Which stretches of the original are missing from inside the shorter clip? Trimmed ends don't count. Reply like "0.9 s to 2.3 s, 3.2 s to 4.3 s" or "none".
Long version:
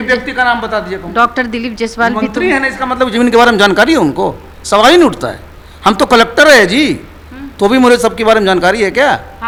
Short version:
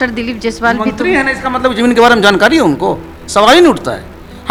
none